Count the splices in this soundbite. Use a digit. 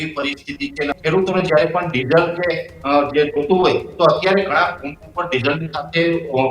1